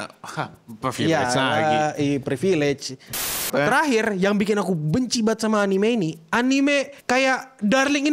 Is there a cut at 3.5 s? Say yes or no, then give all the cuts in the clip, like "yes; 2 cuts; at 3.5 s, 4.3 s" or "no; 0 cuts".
yes; 2 cuts; at 3.5 s, 7.0 s